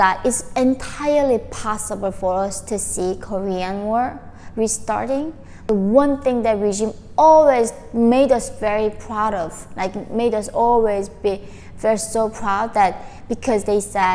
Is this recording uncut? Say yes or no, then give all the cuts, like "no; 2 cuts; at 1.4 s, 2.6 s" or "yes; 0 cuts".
no; 1 cut; at 5.5 s